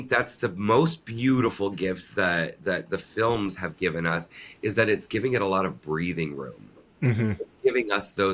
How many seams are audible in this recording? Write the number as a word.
zero